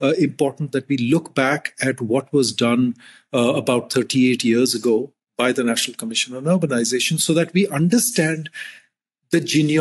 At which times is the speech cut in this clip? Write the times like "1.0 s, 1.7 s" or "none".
none